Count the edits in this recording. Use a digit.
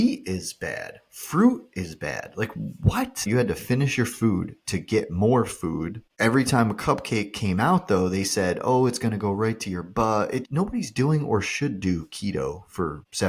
3